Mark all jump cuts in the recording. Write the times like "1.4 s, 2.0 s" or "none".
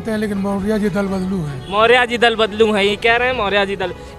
none